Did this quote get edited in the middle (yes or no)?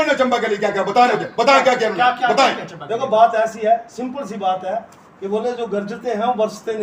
no